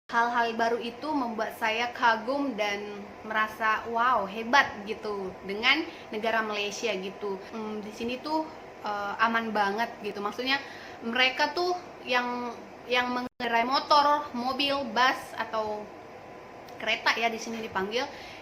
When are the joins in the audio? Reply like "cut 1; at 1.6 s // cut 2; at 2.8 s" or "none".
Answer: cut 1; at 7.5 s